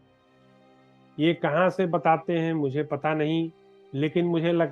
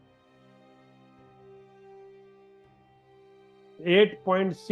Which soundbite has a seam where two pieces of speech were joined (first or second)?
first